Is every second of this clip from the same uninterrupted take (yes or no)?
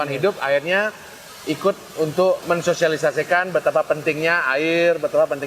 no